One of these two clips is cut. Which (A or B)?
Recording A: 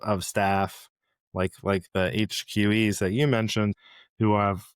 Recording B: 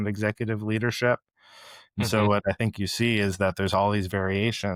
A